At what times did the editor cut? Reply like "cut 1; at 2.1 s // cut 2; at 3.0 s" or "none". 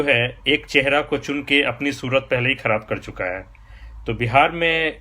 none